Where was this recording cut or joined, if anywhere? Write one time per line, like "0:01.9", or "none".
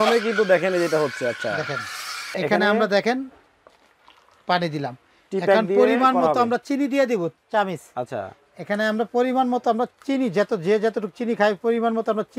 0:02.4